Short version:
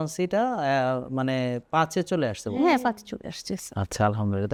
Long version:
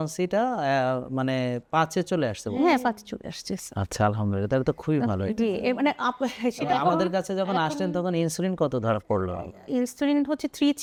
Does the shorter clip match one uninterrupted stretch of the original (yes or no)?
yes